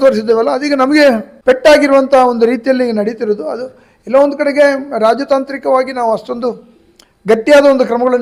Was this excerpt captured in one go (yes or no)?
yes